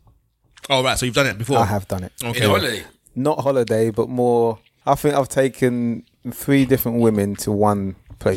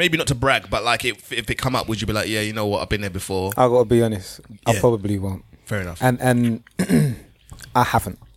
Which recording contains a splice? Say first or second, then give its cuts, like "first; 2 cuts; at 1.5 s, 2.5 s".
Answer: first; 1 cut; at 4.7 s